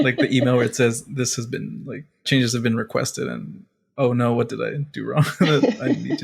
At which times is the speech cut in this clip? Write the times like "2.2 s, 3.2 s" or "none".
none